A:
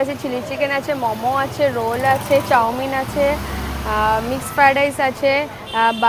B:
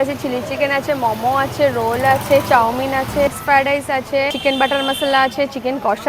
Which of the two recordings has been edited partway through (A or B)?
B